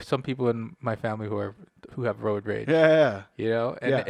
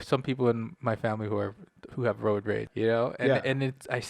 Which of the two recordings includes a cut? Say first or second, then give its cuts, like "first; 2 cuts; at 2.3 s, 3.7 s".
second; 1 cut; at 2.6 s